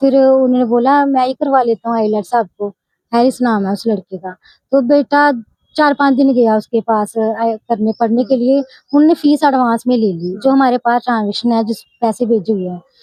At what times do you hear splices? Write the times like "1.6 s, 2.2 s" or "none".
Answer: none